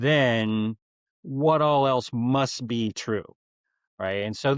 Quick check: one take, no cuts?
yes; 0 cuts

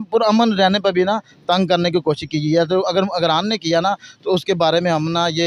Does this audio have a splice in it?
no; 0 cuts

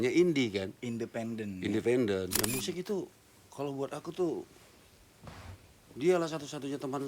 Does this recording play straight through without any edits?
no; 1 cut; at 2.4 s

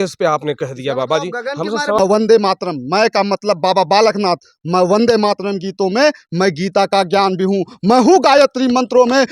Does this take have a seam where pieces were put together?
yes; 1 cut; at 2.0 s

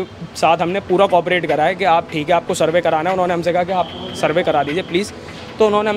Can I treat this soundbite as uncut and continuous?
yes; 0 cuts

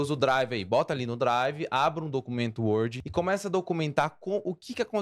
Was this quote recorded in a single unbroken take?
no; 1 cut; at 3.0 s

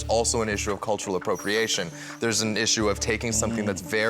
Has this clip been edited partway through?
yes; 1 cut; at 1.9 s

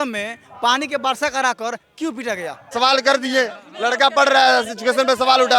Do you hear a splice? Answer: yes; 1 cut; at 2.7 s

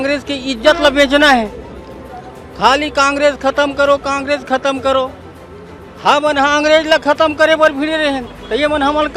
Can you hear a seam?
no; 0 cuts

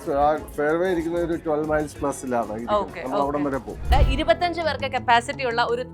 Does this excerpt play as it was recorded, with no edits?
no; 1 cut; at 3.9 s

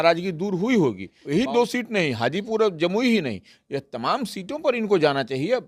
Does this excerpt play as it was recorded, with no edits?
no; 1 cut; at 1.1 s

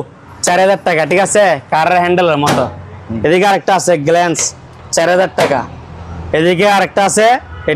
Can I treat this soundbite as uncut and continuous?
yes; 0 cuts

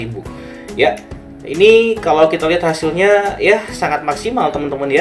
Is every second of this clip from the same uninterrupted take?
yes; 0 cuts

